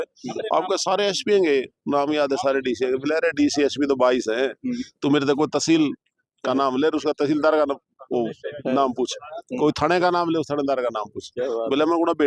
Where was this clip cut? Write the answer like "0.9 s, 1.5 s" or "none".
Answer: none